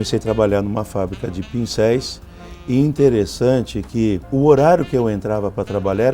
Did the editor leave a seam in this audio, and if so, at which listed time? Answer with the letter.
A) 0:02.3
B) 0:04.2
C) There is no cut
B